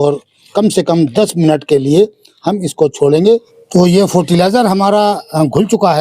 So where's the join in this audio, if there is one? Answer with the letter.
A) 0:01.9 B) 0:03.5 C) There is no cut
B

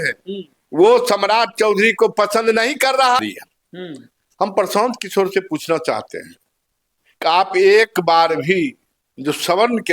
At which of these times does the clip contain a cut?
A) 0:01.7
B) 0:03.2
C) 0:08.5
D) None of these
B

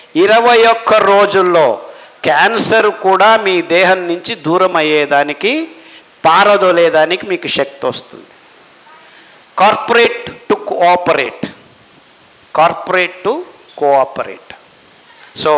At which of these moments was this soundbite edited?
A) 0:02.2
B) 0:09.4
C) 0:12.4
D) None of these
B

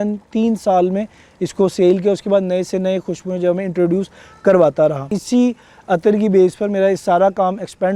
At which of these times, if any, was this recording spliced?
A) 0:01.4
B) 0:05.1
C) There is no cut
B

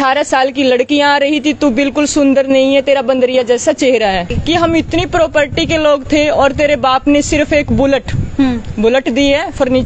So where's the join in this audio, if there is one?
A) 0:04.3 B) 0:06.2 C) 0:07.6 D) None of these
A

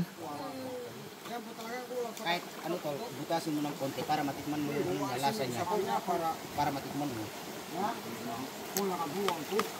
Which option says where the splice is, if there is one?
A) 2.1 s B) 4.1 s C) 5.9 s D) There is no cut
D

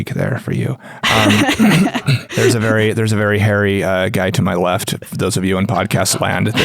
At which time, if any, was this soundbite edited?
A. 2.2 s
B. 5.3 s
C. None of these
A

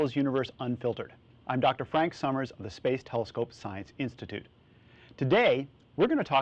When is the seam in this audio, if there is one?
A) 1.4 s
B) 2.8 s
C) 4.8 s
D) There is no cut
B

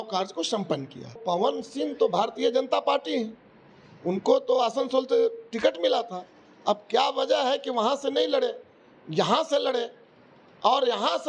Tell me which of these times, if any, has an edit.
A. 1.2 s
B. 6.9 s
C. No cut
A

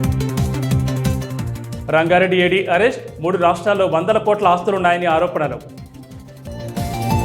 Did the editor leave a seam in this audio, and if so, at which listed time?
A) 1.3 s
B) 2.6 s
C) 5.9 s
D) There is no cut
A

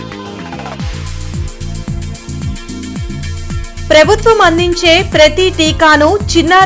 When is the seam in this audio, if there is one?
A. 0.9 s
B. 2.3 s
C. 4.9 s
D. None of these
A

